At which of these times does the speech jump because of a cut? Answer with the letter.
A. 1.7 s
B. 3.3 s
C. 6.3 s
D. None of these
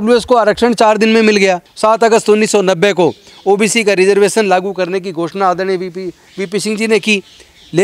A